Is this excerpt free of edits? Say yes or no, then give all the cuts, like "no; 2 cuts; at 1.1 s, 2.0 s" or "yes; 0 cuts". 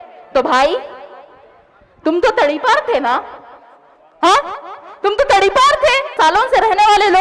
no; 1 cut; at 6.1 s